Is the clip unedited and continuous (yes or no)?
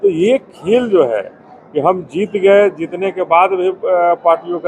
yes